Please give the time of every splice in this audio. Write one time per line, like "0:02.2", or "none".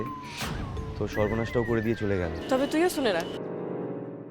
0:02.4